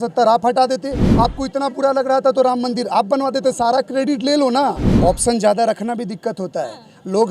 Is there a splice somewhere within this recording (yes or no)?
yes